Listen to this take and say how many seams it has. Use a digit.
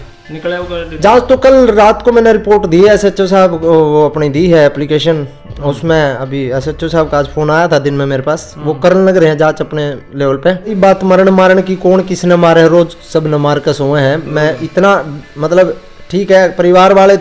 1